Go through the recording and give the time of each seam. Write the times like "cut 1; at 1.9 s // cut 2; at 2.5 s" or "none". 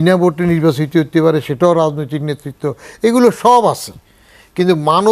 none